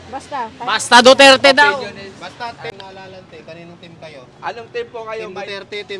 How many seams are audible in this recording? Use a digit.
1